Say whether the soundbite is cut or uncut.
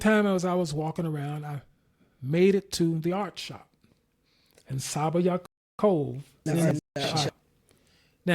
uncut